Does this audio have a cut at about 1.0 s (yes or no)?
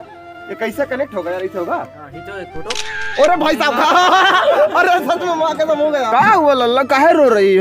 no